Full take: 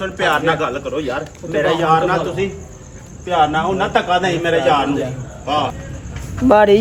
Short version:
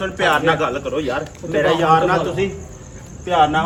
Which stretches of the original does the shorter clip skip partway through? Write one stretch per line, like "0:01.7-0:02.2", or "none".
none